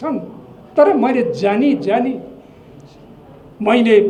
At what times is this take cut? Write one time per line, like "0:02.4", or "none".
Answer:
none